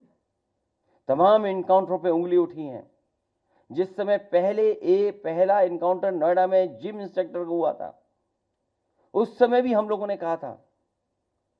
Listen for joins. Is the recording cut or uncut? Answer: uncut